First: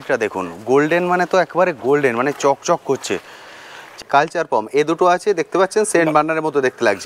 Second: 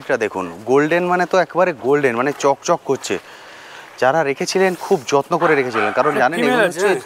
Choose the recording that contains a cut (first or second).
first